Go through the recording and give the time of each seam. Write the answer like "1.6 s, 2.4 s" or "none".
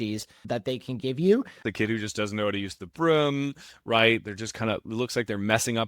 1.6 s